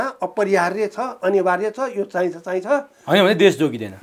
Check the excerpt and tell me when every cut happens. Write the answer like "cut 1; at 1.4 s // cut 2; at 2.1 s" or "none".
none